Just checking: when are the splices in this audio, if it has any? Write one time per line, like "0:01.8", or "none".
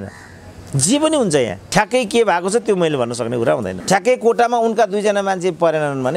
0:01.6
0:03.7